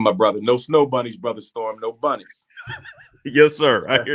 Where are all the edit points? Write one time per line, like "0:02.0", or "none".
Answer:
none